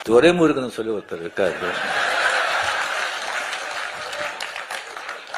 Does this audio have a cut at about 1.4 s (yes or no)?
no